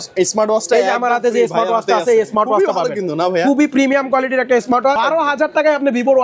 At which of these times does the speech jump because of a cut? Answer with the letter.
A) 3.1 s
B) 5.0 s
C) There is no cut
B